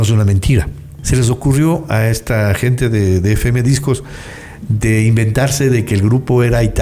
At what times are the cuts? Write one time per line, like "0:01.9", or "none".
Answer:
0:00.9